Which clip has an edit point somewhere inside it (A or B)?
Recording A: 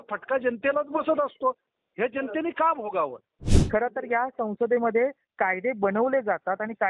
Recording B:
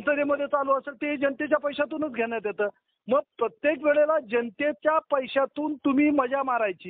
A